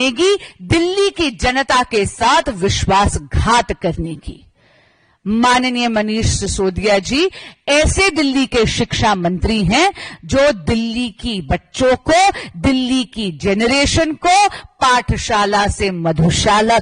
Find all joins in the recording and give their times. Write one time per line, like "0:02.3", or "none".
none